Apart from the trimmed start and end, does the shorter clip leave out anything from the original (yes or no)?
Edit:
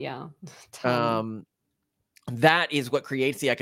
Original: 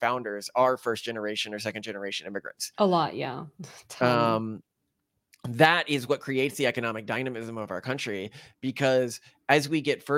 no